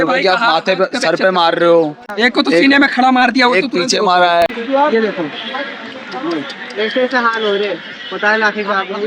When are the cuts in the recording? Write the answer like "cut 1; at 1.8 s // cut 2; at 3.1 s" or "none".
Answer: cut 1; at 2.1 s // cut 2; at 4.5 s